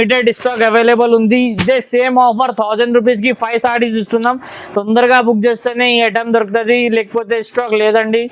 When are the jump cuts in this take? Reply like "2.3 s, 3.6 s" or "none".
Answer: none